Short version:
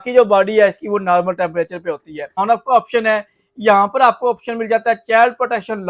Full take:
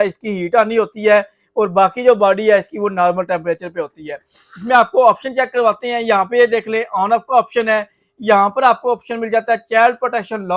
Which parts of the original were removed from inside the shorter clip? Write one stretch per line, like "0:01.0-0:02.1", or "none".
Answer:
0:04.2-0:07.0